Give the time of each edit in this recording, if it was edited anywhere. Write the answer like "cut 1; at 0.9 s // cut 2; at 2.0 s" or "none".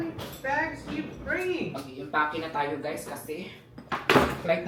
none